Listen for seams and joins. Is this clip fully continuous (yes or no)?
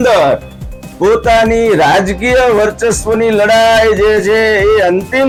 yes